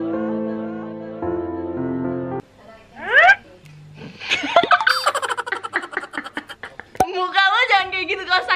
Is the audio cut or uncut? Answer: cut